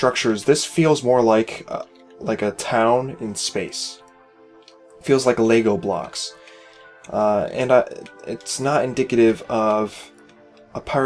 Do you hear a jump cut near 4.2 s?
no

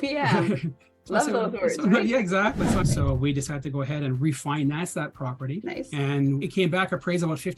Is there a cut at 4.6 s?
no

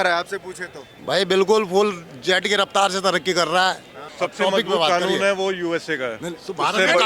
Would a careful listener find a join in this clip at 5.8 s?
no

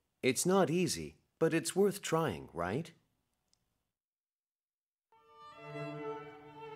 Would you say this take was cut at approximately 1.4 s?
no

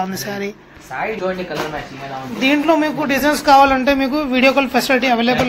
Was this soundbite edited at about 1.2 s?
yes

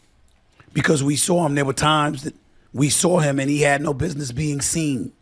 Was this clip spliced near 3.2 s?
yes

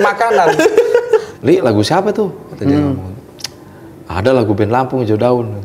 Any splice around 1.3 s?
yes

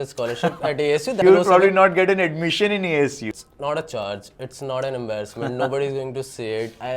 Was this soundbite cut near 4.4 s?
no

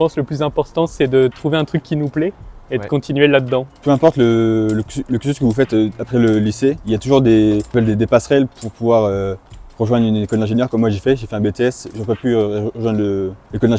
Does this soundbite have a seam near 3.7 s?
no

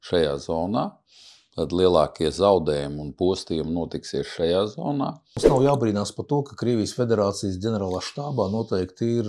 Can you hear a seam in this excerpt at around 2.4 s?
no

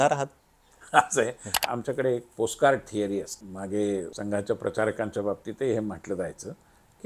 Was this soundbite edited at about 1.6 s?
yes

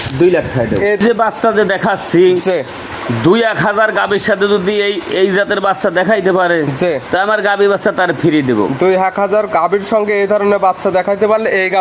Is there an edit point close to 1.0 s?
yes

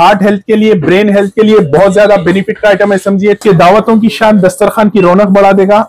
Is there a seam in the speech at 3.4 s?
yes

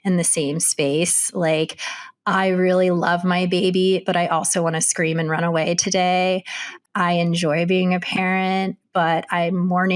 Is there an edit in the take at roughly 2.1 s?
no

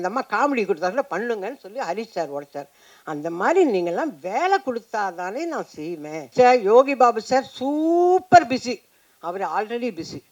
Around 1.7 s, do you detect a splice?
no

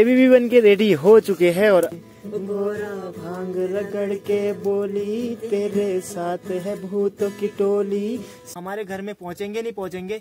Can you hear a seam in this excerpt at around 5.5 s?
no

